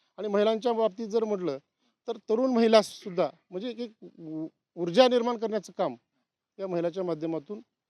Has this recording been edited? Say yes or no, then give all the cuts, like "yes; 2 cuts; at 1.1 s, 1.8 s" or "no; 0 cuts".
no; 0 cuts